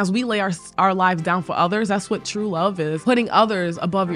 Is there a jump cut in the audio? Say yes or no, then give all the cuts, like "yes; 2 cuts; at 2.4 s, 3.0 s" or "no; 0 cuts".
yes; 1 cut; at 3.0 s